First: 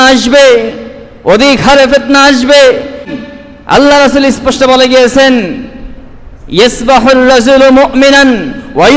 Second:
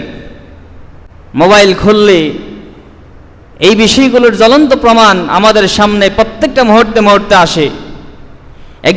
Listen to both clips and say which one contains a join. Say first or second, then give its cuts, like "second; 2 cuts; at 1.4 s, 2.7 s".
first; 1 cut; at 3.1 s